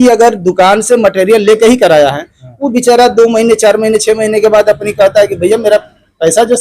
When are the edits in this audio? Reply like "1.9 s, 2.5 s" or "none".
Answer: none

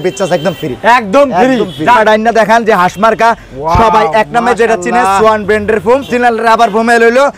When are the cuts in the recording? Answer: 2.0 s, 6.1 s

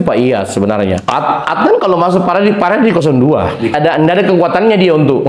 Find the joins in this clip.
1.0 s, 3.7 s

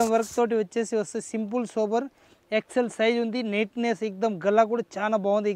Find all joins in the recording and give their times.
none

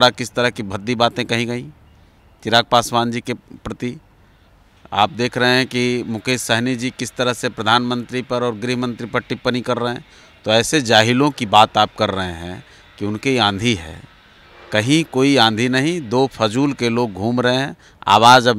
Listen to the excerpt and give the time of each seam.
none

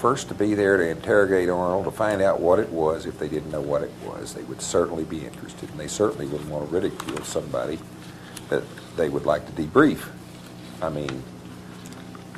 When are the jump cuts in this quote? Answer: 6.2 s

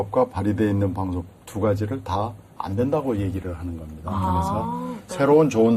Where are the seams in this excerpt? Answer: 4.1 s

